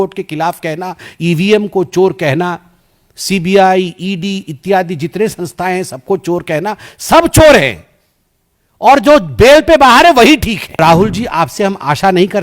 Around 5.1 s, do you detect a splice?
no; 1 cut; at 10.8 s

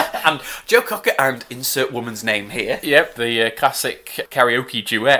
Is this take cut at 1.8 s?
no; 2 cuts; at 3.1 s, 4.2 s

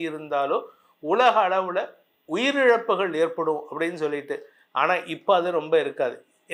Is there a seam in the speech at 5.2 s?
no; 0 cuts

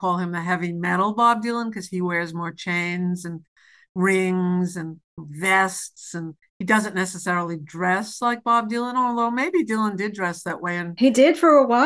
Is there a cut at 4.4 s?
no; 1 cut; at 10.9 s

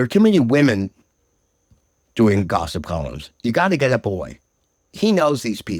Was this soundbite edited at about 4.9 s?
yes; 1 cut; at 4.9 s

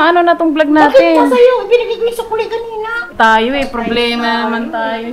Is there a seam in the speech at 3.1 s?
yes; 1 cut; at 3.1 s

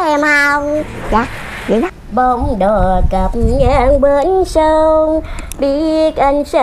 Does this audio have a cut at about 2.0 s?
yes; 1 cut; at 2.0 s

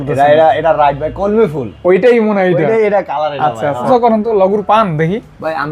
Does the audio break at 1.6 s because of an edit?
no; 1 cut; at 3.9 s

